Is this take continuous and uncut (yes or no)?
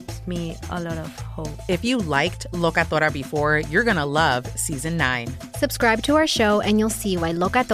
yes